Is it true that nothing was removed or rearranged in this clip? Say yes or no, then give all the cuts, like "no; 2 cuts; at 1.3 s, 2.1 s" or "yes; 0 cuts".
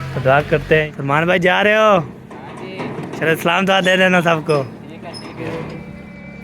no; 2 cuts; at 0.9 s, 5.4 s